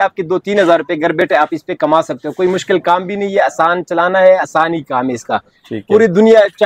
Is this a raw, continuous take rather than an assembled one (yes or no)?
yes